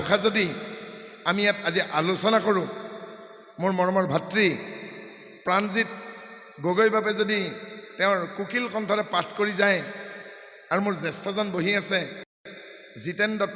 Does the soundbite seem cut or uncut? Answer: uncut